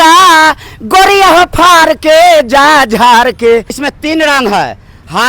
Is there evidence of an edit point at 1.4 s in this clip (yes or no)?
no